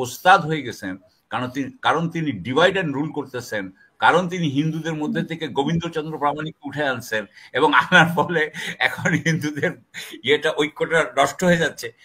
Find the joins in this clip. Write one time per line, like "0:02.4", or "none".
none